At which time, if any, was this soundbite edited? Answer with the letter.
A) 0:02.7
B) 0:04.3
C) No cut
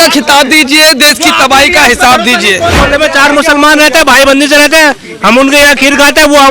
A